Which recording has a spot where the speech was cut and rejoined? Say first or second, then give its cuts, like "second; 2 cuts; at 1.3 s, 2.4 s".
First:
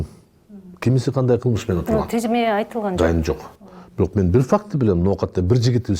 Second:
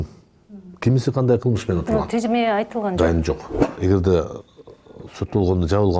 second; 1 cut; at 3.7 s